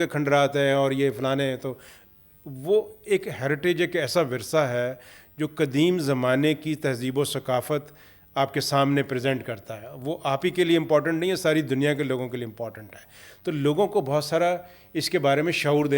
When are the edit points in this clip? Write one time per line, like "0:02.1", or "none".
none